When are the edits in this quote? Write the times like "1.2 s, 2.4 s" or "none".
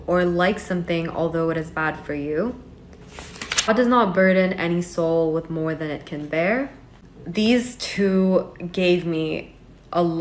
none